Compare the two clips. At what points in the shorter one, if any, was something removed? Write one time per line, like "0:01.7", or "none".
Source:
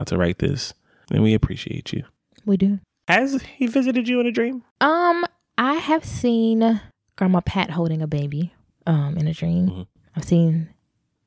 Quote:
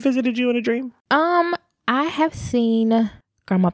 none